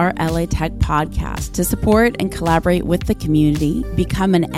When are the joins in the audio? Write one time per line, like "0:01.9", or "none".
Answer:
none